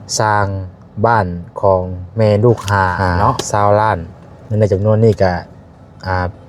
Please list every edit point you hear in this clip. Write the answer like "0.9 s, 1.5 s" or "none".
3.4 s